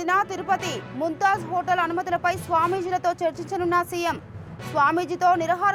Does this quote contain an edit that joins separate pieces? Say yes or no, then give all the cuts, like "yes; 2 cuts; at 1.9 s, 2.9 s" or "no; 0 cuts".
no; 0 cuts